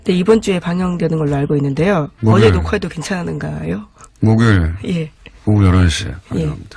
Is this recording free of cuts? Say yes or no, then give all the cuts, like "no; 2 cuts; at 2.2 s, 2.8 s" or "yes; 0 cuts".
no; 1 cut; at 1.3 s